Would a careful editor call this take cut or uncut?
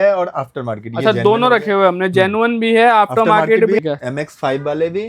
cut